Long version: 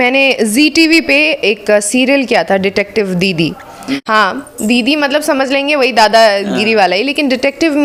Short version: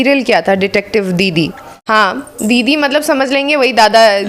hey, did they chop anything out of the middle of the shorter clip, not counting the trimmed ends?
yes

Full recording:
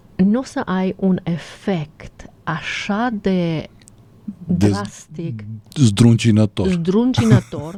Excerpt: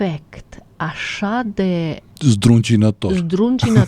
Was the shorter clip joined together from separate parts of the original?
yes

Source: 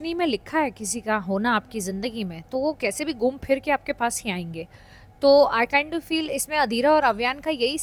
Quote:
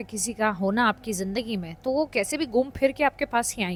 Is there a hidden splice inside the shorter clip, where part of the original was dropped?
no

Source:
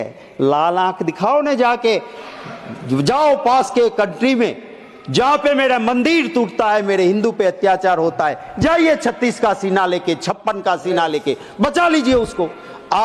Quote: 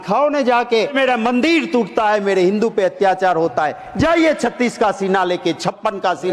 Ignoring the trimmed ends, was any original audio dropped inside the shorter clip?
yes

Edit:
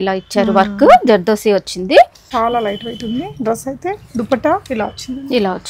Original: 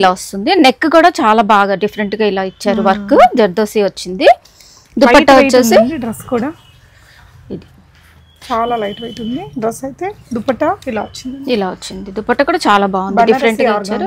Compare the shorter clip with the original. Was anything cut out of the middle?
yes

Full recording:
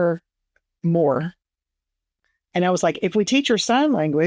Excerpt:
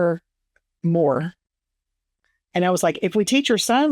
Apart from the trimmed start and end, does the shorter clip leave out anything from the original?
no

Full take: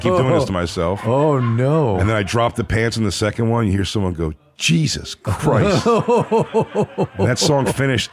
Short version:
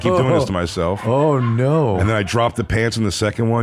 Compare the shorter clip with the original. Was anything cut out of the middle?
no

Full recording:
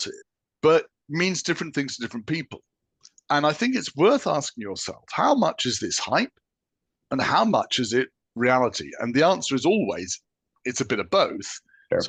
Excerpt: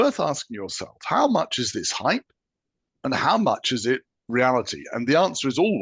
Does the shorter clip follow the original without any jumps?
yes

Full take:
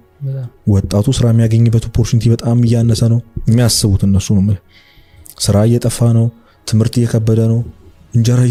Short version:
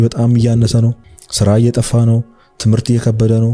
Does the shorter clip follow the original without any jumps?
no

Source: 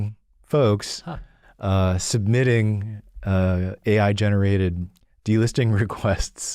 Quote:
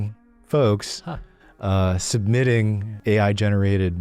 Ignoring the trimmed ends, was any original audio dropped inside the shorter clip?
yes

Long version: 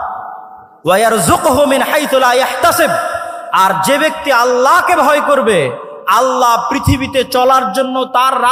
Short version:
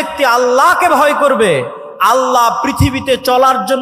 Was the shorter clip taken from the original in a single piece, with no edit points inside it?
yes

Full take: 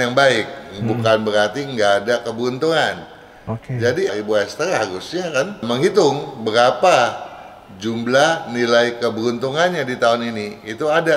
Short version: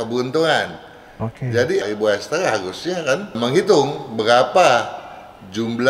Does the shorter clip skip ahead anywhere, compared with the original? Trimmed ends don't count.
no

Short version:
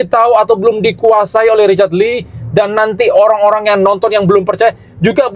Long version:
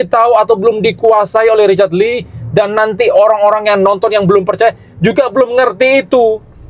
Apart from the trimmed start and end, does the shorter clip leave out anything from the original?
no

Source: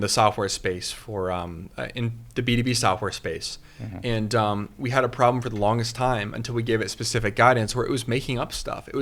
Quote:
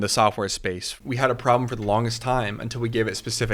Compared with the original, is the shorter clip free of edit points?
no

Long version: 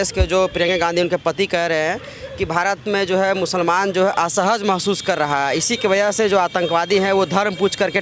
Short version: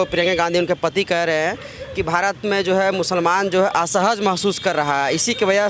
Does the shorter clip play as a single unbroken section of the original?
yes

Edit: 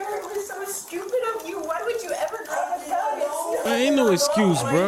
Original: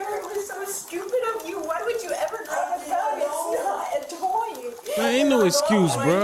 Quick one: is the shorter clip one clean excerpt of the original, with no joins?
no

